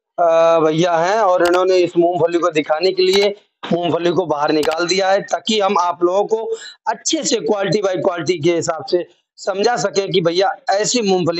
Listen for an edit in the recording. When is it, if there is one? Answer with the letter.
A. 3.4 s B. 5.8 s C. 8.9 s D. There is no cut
D